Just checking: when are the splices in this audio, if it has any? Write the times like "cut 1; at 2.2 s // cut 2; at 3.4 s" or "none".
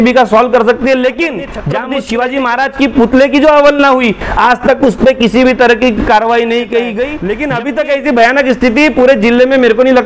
cut 1; at 1.5 s // cut 2; at 7.1 s